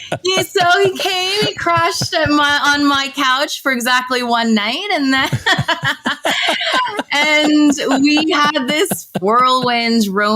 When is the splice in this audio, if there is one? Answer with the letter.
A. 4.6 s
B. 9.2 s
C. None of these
B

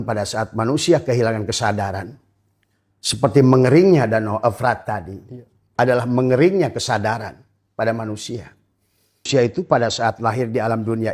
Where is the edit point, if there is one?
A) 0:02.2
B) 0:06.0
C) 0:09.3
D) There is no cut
C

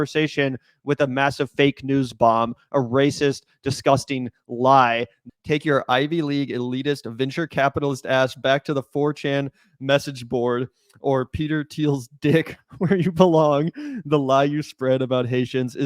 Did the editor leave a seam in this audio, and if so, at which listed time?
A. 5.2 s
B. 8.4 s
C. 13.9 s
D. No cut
A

